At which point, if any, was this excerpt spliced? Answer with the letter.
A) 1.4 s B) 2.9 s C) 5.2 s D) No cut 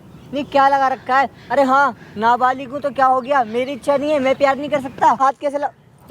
C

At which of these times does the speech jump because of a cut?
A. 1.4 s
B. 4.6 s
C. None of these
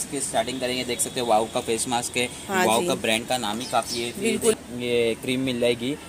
B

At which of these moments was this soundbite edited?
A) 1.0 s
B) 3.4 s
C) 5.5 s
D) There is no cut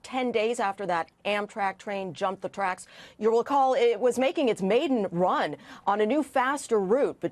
A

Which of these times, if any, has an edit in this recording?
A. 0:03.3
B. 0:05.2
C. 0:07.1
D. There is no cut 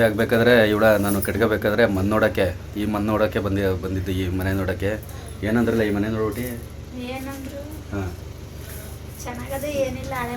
D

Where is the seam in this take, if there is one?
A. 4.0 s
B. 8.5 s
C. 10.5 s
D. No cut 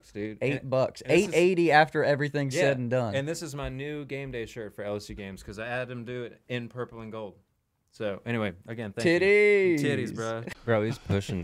C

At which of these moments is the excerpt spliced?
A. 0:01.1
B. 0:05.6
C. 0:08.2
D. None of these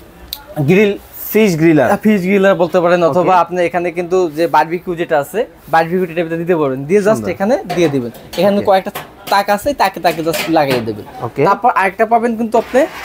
D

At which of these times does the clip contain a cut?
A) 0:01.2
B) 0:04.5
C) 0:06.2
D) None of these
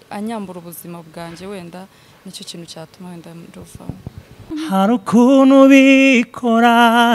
B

